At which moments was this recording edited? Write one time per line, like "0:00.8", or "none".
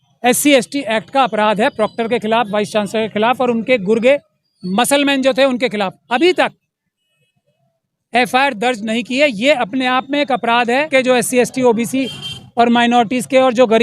0:10.9